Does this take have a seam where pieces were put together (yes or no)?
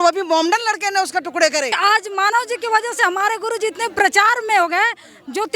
yes